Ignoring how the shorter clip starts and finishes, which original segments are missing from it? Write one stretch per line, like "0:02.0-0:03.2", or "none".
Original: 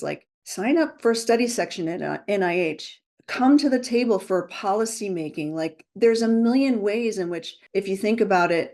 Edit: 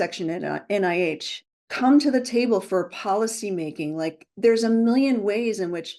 none